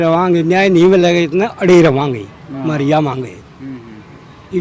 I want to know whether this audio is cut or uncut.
uncut